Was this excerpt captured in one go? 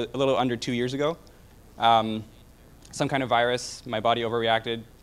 yes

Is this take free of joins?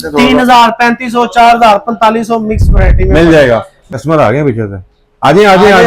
no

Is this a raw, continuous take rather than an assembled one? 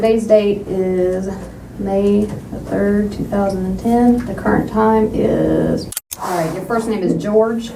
no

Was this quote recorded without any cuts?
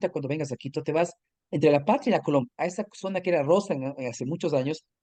yes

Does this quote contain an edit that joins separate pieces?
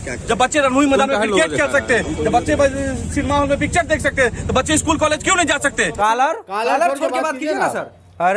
yes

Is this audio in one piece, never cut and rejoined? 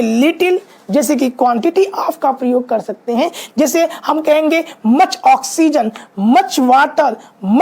yes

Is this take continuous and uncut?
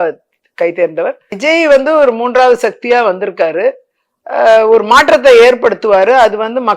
no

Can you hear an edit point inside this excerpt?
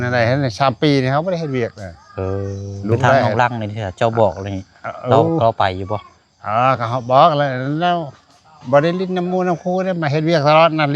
yes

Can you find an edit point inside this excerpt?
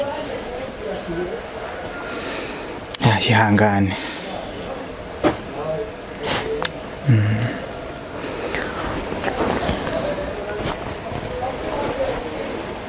no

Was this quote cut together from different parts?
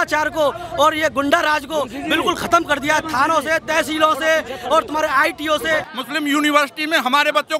yes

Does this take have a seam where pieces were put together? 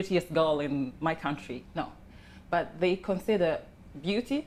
no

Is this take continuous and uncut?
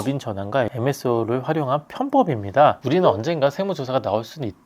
no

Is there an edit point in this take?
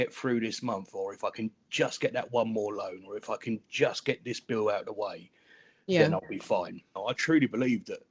yes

